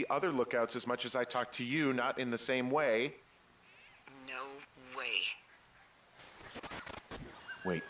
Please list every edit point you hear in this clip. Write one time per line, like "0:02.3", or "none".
0:06.1

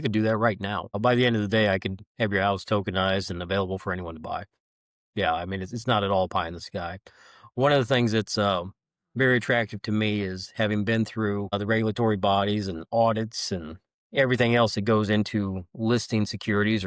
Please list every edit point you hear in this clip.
0:01.0
0:11.5

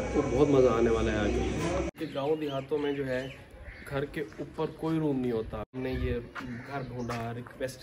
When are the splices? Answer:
0:02.0
0:05.7

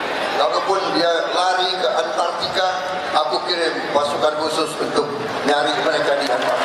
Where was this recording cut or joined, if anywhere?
none

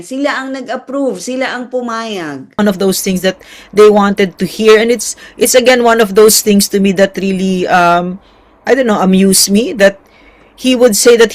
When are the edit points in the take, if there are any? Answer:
0:02.6

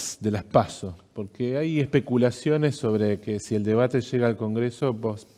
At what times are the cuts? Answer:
none

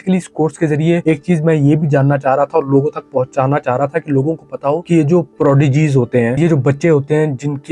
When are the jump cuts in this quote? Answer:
none

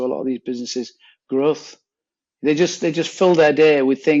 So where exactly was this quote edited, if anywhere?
none

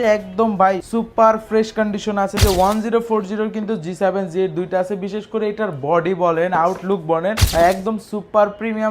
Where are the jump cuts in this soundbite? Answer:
0:00.8
0:02.4
0:07.4

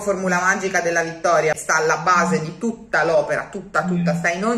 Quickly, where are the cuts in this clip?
0:01.6

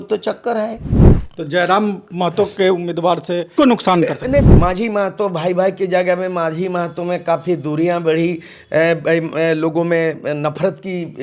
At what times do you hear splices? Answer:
0:03.5
0:04.5

